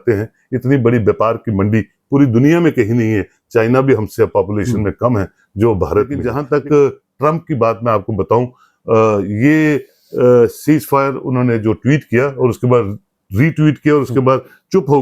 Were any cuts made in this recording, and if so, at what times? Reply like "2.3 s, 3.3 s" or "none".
6.3 s